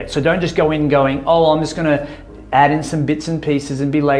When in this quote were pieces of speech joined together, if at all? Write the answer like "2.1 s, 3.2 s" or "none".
none